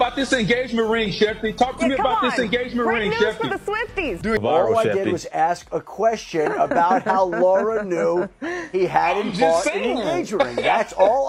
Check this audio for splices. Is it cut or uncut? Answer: uncut